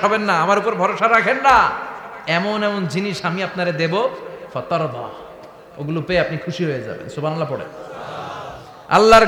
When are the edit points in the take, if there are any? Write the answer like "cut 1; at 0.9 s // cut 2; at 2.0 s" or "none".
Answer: none